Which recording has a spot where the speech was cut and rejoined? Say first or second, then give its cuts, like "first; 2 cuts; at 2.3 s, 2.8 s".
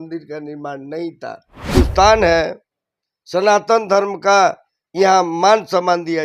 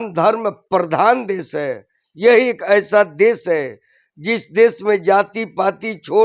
first; 1 cut; at 1.7 s